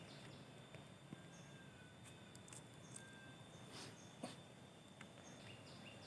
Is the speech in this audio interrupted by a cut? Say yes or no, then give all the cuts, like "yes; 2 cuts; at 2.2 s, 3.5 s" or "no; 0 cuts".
no; 0 cuts